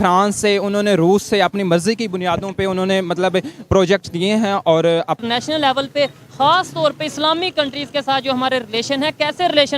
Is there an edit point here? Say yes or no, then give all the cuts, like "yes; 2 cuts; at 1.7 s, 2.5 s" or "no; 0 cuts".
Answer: yes; 1 cut; at 5.2 s